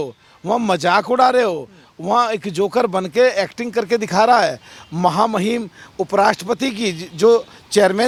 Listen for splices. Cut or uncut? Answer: uncut